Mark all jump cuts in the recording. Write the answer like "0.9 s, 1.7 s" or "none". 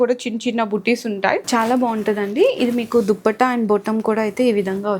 1.5 s